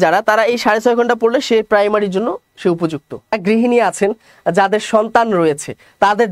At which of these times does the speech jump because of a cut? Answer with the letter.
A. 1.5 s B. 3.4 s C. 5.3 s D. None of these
B